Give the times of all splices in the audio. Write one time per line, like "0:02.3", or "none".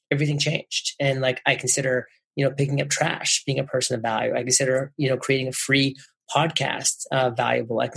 none